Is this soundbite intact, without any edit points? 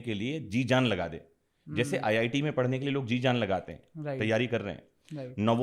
yes; 0 cuts

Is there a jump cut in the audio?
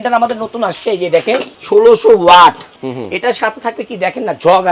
yes; 2 cuts; at 1.5 s, 2.8 s

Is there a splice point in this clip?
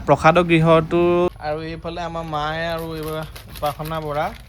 yes; 1 cut; at 1.3 s

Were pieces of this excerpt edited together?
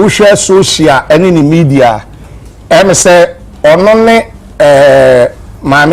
no; 0 cuts

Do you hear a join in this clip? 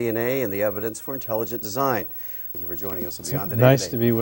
yes; 1 cut; at 2.6 s

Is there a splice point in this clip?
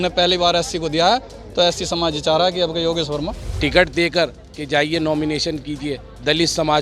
yes; 1 cut; at 3.4 s

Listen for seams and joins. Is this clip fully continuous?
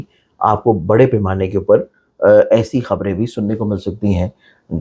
yes; 0 cuts

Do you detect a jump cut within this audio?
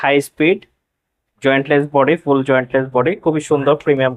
no; 0 cuts

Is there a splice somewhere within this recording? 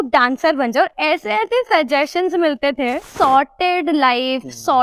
yes; 1 cut; at 3.1 s

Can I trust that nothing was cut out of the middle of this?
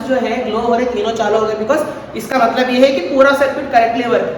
yes; 0 cuts

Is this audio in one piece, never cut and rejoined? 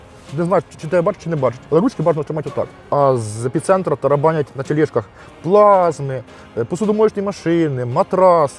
no; 1 cut; at 2.8 s

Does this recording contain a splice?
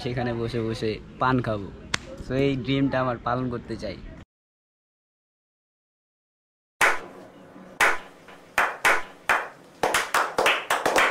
no; 0 cuts

